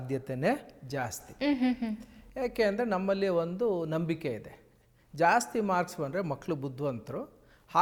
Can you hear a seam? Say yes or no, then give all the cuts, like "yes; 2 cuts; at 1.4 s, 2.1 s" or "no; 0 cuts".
no; 0 cuts